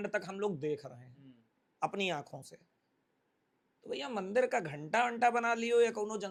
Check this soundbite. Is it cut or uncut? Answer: uncut